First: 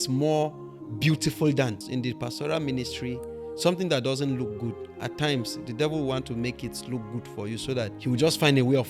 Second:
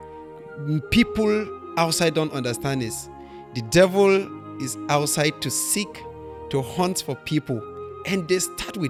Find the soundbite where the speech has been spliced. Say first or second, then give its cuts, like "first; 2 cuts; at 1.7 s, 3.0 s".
first; 2 cuts; at 1.8 s, 7.9 s